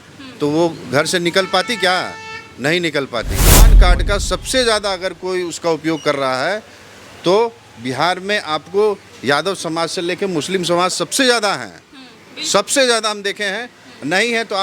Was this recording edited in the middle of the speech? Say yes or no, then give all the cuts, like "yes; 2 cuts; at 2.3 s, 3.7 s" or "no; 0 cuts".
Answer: yes; 1 cut; at 3.7 s